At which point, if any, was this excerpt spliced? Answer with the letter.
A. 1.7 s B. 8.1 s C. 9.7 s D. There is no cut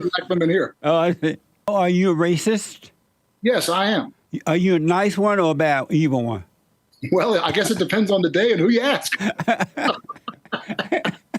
A